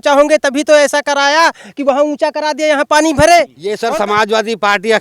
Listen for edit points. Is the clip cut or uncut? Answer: cut